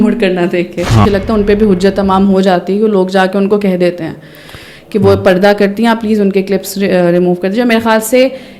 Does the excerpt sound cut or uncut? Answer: cut